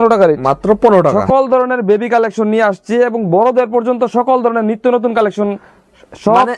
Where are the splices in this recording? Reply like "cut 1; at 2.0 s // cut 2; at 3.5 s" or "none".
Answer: cut 1; at 1.2 s